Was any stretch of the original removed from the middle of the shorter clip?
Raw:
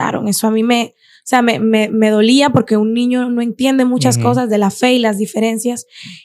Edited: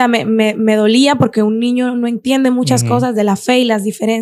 no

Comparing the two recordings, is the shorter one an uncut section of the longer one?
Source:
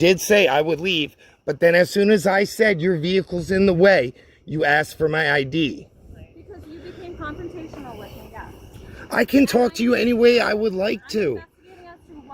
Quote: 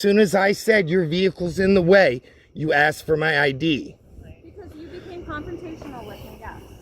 yes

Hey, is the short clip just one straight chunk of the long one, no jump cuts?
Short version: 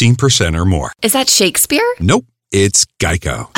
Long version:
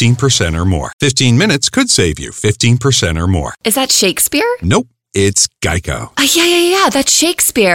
no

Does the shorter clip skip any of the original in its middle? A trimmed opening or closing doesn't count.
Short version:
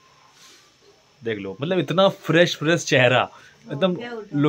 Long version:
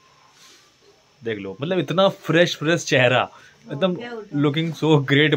no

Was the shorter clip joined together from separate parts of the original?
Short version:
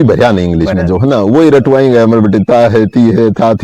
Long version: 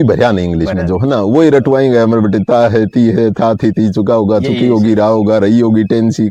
no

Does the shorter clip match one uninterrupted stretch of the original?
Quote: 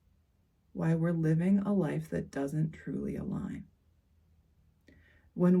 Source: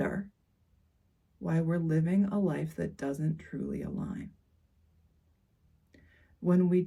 no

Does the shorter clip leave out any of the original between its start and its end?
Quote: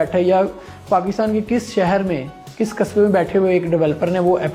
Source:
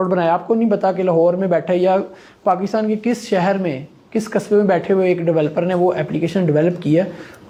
no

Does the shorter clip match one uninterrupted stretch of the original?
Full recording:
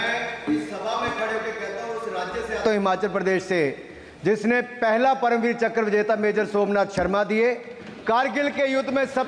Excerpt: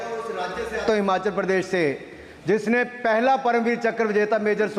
yes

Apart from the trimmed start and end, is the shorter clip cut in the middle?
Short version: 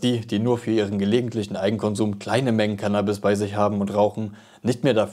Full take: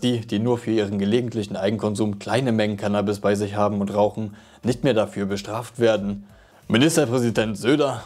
no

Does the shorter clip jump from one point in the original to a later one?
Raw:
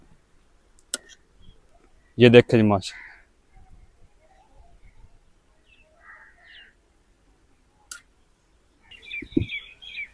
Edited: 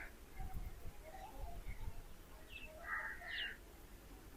no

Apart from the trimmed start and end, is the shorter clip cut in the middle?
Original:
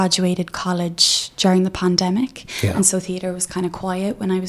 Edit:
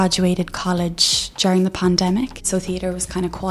yes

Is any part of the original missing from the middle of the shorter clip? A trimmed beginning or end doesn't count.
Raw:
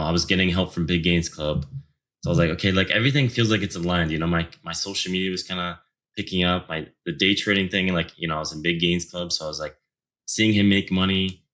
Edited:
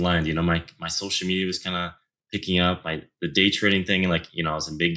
no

